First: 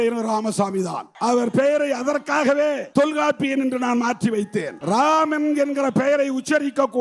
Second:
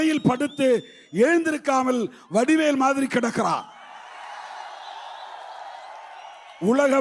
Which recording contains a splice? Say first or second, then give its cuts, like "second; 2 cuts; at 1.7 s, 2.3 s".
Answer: first; 3 cuts; at 1.0 s, 2.8 s, 4.7 s